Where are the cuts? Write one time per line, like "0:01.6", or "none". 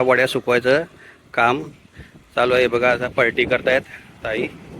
none